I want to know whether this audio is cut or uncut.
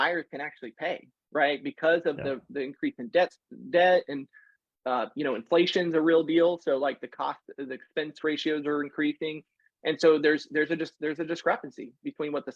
uncut